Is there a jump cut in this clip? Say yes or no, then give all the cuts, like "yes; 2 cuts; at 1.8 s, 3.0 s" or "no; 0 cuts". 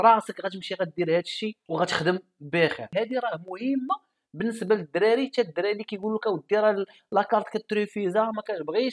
yes; 2 cuts; at 1.6 s, 2.9 s